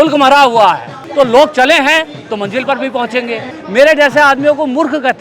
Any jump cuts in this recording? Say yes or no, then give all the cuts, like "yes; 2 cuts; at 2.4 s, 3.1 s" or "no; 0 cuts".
yes; 2 cuts; at 1.0 s, 3.5 s